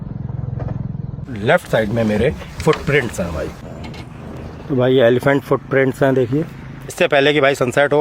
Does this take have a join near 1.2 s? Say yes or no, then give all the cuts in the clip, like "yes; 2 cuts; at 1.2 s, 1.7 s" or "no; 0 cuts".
yes; 2 cuts; at 1.2 s, 6.9 s